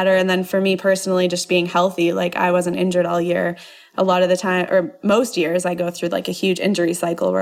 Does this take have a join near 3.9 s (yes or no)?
no